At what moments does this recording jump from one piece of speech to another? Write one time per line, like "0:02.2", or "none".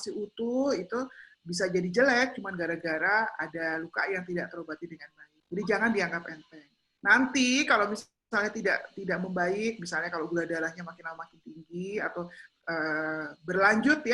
none